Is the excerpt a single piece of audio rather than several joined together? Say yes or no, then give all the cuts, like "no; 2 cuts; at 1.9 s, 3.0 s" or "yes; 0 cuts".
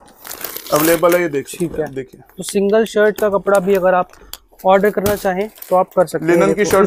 yes; 0 cuts